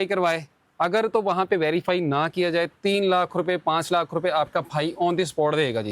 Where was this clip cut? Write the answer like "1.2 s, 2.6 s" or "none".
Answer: none